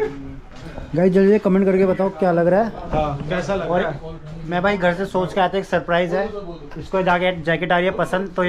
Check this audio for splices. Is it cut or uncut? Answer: uncut